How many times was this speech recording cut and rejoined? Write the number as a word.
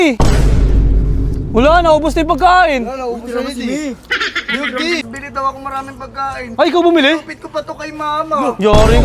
one